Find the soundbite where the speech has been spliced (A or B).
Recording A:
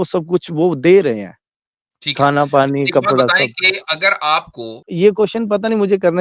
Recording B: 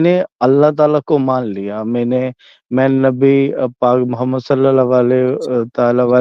A